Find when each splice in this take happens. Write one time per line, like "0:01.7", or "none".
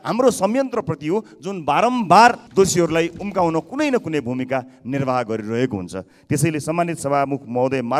0:02.4